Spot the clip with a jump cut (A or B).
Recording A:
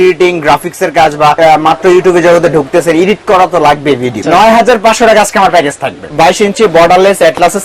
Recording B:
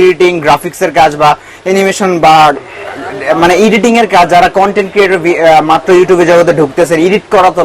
A